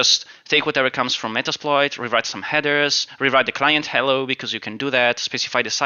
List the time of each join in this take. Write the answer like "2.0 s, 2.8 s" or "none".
none